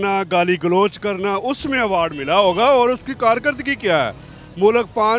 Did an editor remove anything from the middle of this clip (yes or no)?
no